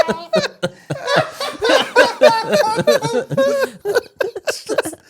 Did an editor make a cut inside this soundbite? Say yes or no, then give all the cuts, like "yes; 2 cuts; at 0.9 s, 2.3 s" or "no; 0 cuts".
yes; 1 cut; at 3.8 s